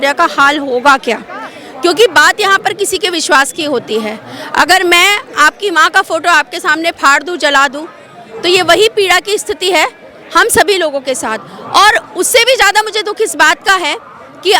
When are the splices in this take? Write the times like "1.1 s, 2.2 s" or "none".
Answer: none